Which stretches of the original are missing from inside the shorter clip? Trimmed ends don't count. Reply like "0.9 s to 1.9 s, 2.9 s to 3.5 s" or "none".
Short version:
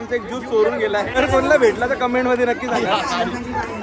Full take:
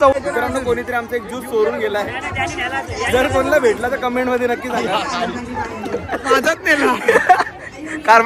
2.2 s to 3.2 s

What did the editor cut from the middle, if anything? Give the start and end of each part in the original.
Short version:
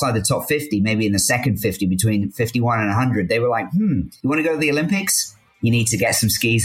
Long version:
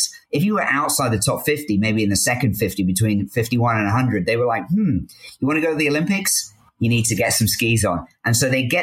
5.1 s to 5.3 s

